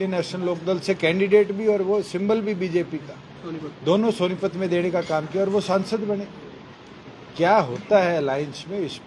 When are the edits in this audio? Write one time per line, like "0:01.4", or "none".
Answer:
none